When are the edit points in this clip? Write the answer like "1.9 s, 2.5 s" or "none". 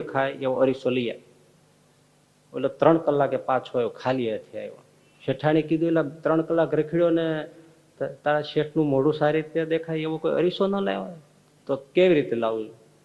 none